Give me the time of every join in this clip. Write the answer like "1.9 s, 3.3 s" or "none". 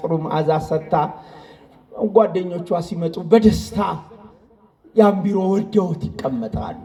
none

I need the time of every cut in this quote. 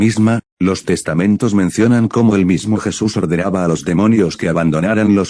none

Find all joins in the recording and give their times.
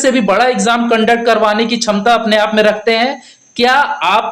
none

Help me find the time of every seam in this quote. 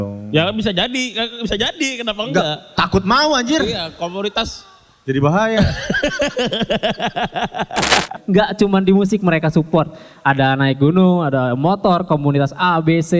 8.1 s

